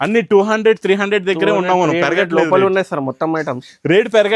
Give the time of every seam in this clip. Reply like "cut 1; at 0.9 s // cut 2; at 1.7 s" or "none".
none